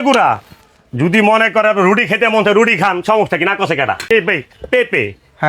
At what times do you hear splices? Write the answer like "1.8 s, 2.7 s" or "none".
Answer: 4.1 s